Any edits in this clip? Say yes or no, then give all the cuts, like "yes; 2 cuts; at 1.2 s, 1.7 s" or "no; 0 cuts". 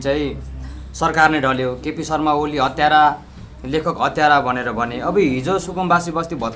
no; 0 cuts